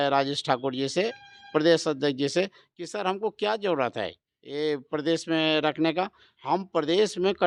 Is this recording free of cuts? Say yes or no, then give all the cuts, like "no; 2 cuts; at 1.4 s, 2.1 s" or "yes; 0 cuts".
yes; 0 cuts